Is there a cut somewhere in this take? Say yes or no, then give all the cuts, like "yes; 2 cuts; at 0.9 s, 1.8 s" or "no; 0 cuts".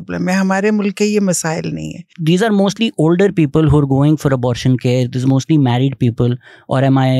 yes; 1 cut; at 2.1 s